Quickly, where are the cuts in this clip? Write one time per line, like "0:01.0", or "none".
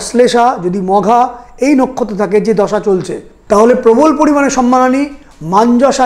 0:03.4